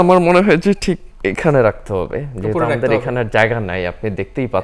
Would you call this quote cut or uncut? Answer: uncut